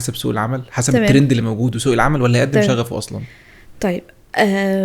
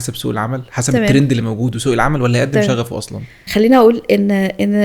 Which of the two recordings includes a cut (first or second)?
second